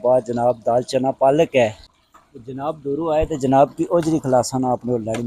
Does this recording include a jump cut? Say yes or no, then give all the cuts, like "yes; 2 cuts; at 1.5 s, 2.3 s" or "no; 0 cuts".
yes; 1 cut; at 1.9 s